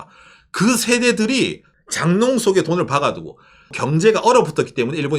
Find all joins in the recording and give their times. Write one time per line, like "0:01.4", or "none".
0:01.7
0:03.8